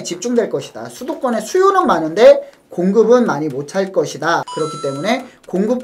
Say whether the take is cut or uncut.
cut